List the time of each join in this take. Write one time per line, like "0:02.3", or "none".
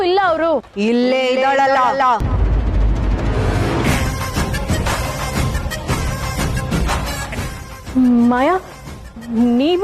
0:02.2
0:04.0
0:07.8